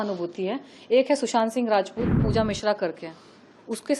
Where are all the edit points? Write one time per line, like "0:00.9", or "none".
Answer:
0:02.2